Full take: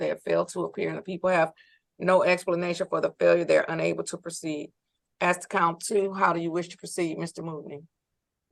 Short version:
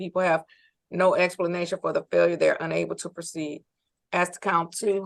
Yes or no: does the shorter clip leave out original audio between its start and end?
no